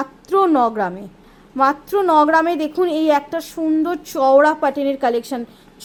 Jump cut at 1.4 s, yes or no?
no